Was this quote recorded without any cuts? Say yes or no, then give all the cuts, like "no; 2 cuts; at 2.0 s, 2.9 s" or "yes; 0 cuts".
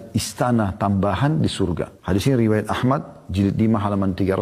yes; 0 cuts